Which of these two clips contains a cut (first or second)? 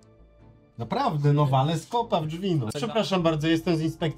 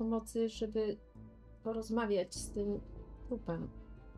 first